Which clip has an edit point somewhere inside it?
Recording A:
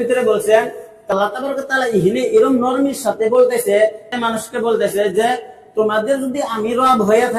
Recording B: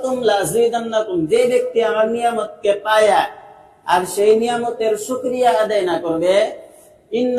A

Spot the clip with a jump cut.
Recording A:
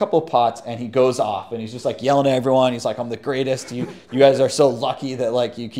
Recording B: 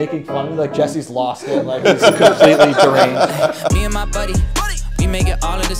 B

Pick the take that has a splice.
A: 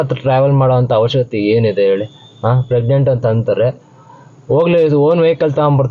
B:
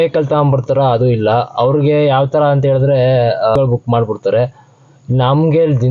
B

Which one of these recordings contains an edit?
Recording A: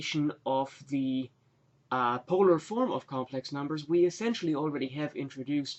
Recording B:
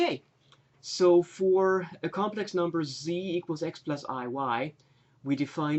B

